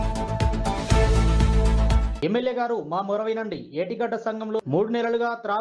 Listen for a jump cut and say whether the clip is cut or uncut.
cut